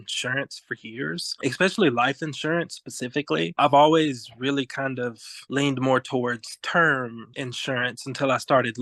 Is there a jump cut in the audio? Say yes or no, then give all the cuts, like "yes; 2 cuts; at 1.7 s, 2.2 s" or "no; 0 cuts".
no; 0 cuts